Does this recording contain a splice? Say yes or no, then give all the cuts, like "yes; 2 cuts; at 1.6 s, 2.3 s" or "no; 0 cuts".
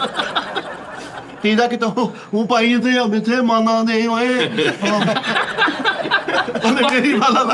yes; 1 cut; at 1.3 s